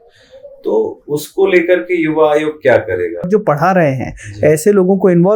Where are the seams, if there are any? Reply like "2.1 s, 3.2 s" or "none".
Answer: 3.3 s